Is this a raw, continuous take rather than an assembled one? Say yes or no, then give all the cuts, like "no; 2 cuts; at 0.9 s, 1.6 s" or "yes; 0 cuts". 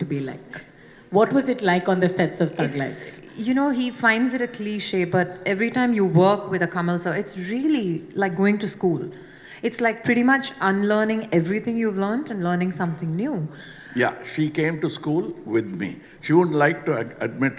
yes; 0 cuts